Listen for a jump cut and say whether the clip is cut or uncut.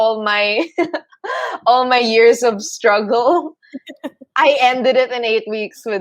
uncut